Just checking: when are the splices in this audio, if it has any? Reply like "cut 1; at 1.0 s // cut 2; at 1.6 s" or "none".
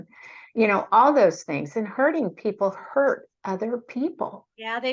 none